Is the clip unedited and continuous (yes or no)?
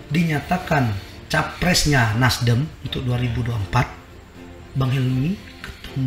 yes